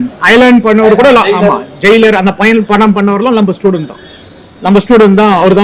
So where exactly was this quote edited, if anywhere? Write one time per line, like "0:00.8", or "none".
none